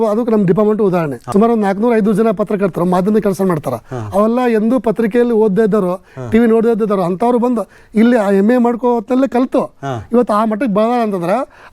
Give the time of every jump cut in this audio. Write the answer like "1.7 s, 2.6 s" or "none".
1.2 s